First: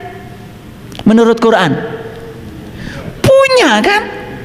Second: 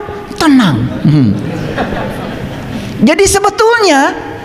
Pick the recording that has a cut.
second; 1 cut; at 2.9 s

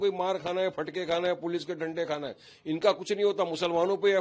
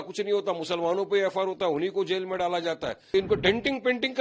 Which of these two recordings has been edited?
second; 1 cut; at 3.1 s

